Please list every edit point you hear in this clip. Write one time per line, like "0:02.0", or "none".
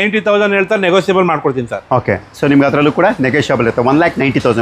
none